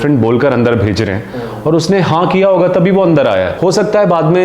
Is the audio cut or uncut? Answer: cut